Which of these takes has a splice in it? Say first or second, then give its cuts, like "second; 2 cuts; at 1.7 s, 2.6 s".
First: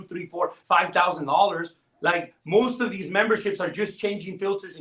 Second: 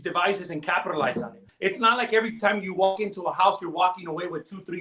second; 1 cut; at 1.5 s